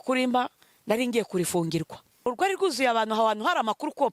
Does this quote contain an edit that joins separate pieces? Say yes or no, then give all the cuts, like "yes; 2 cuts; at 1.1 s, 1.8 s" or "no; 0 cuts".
yes; 1 cut; at 2.3 s